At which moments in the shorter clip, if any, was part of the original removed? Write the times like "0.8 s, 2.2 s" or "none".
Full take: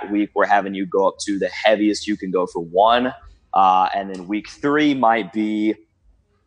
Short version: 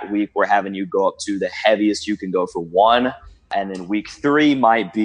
3.5 s